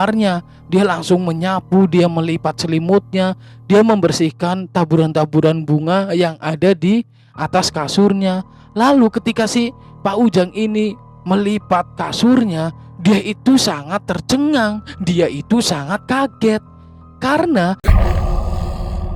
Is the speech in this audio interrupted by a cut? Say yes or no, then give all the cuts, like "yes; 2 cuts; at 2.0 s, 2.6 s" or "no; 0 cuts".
yes; 1 cut; at 17.9 s